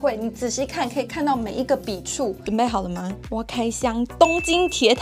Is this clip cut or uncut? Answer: cut